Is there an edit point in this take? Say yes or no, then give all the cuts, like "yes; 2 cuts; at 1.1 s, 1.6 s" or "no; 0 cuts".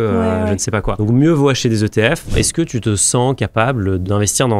yes; 2 cuts; at 0.9 s, 2.3 s